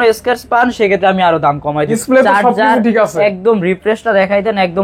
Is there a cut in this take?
yes; 1 cut; at 2.0 s

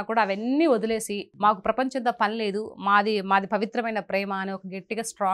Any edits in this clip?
yes; 1 cut; at 1.2 s

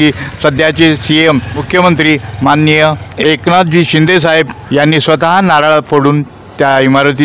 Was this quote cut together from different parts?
yes; 3 cuts; at 1.6 s, 3.1 s, 4.6 s

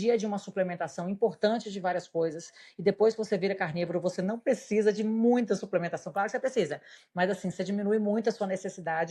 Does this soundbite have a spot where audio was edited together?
no; 0 cuts

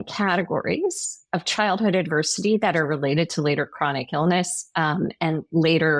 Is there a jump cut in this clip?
no; 0 cuts

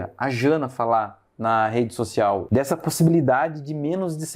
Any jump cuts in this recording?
yes; 1 cut; at 2.4 s

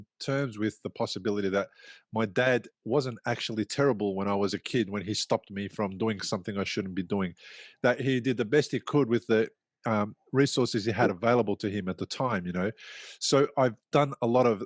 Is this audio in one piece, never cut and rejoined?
yes; 0 cuts

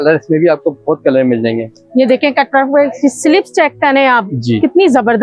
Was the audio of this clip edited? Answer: no; 0 cuts

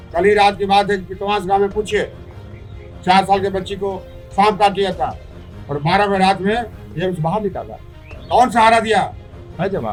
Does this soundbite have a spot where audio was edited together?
no; 0 cuts

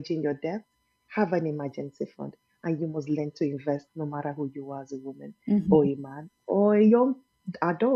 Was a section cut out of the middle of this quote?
no; 0 cuts

